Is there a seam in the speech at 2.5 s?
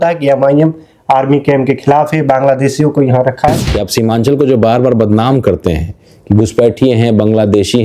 no; 1 cut; at 3.7 s

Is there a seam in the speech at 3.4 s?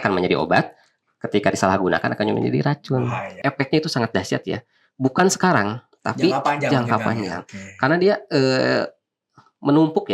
yes; 1 cut; at 3.4 s

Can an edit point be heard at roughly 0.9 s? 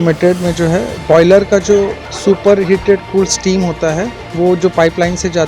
yes; 3 cuts; at 0.9 s, 2.0 s, 4.2 s

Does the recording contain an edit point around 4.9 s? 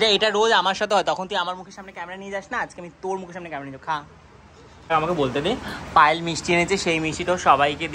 yes; 1 cut; at 4.9 s

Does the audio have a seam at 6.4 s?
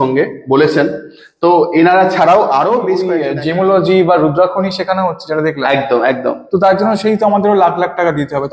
no; 1 cut; at 3.2 s

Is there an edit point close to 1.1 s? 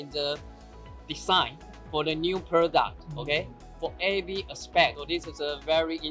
no; 1 cut; at 5.0 s

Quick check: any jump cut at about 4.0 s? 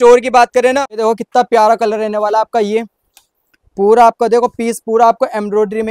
no; 1 cut; at 1.0 s

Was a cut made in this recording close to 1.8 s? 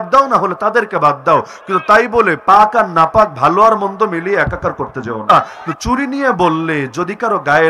no; 1 cut; at 5.3 s

